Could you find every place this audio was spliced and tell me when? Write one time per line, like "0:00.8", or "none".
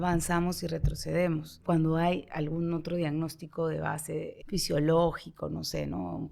0:01.6
0:04.4